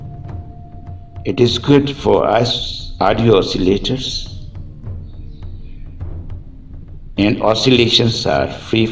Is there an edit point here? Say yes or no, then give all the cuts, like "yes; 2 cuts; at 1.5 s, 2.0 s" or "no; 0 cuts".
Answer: yes; 3 cuts; at 1.2 s, 4.2 s, 7.1 s